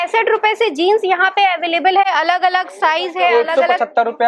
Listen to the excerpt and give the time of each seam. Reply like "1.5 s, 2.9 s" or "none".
none